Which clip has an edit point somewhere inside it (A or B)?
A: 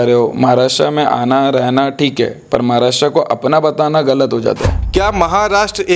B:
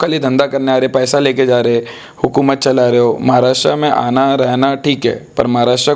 A